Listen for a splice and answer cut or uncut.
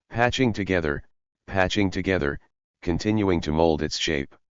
cut